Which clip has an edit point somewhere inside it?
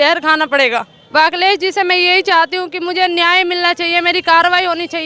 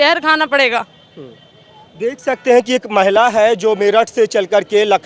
first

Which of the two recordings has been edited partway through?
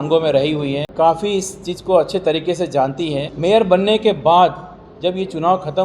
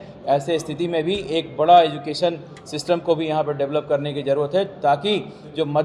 first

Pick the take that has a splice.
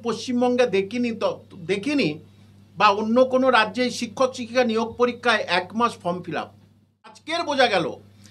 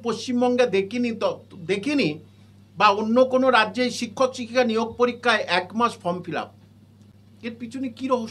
first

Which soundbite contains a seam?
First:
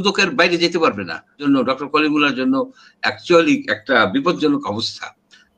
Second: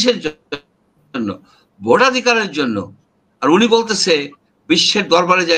first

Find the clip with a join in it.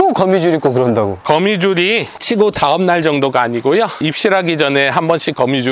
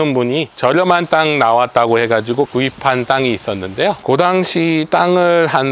second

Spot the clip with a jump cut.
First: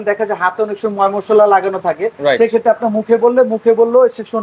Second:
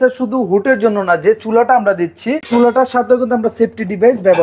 second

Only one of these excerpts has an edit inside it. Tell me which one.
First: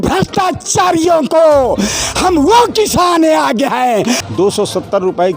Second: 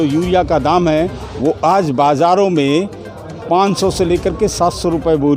first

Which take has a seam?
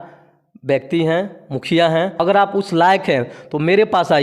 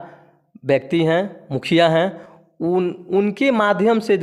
first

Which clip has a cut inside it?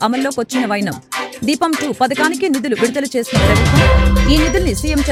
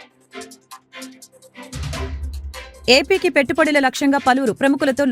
second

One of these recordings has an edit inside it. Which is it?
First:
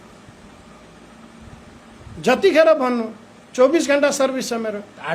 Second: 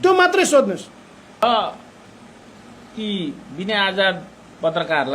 second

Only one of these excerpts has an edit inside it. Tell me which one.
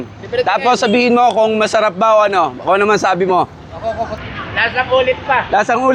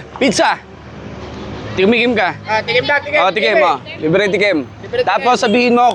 first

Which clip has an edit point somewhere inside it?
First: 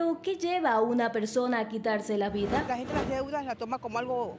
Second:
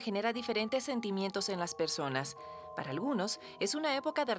first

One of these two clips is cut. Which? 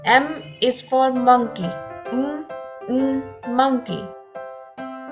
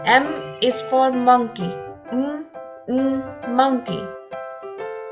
second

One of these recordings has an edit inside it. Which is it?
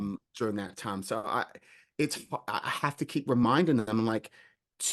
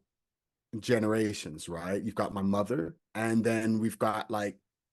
second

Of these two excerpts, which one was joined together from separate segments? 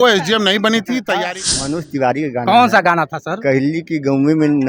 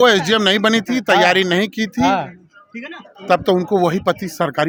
first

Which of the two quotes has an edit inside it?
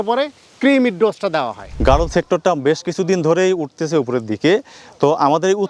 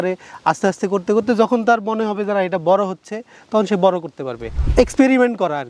first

